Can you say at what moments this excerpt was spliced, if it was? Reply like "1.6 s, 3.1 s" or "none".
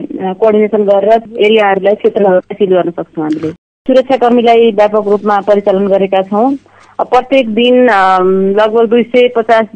1.2 s, 3.7 s

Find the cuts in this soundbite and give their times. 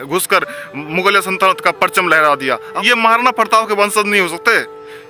2.7 s

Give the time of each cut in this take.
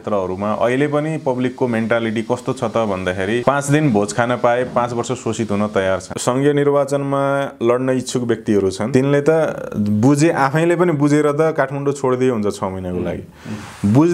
3.4 s, 6.1 s, 8.8 s

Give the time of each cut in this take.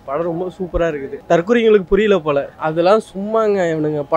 1.1 s, 2.6 s

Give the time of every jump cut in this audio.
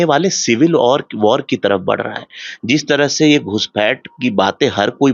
none

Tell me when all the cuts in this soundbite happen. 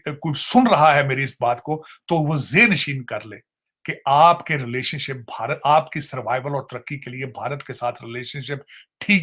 none

